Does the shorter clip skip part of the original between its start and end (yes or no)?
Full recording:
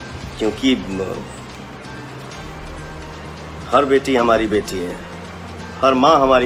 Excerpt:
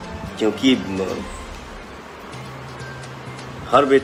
no